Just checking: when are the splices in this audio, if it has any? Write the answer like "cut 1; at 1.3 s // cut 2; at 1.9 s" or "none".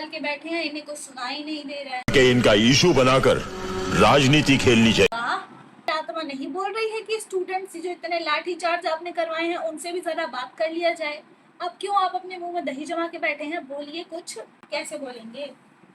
cut 1; at 2.1 s // cut 2; at 5.9 s